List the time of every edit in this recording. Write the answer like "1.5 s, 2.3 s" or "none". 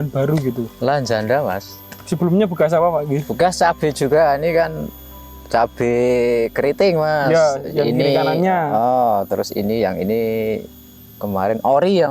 none

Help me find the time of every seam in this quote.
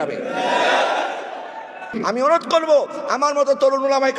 1.9 s

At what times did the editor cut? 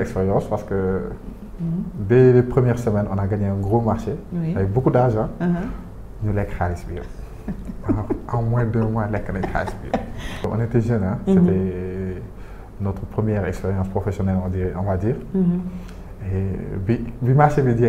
10.5 s

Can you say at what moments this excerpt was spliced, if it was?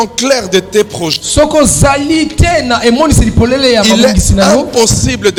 none

